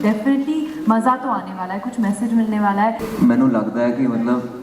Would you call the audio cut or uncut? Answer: cut